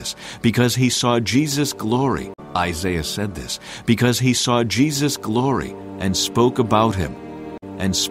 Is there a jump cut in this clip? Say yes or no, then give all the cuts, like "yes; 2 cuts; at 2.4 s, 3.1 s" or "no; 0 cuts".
no; 0 cuts